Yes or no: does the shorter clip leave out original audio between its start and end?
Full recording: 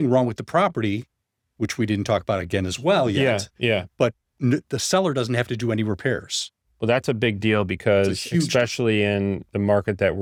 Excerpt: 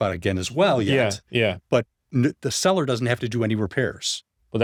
no